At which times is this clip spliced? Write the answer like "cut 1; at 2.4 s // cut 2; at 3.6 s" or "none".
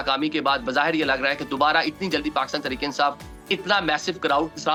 none